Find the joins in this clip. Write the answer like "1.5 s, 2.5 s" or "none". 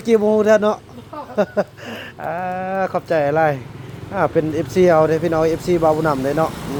none